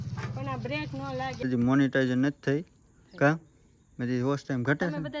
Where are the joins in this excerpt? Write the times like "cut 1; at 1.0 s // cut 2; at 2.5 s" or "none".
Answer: cut 1; at 1.5 s